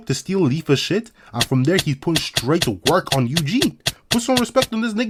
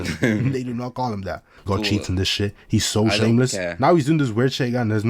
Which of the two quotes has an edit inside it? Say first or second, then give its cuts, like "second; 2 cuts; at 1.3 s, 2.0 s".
second; 1 cut; at 1.7 s